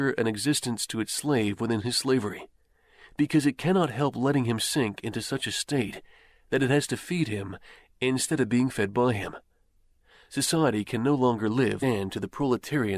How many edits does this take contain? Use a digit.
0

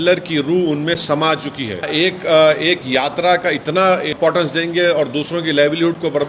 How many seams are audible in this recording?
2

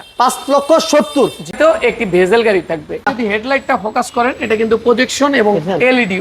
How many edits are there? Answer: 2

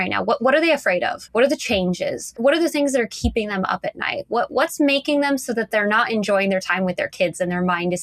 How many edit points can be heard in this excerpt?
2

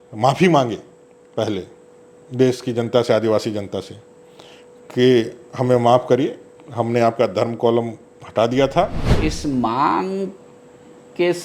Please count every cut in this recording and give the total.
1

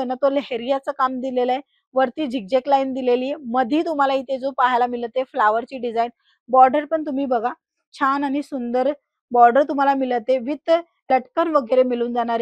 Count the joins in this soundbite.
0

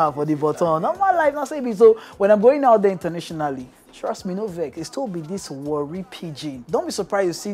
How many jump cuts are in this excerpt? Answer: 1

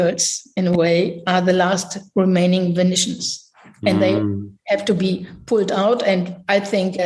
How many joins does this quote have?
0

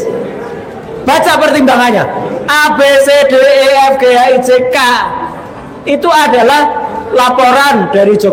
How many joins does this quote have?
0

